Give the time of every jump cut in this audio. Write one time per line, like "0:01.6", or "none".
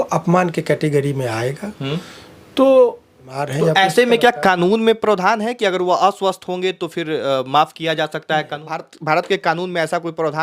0:03.4
0:08.9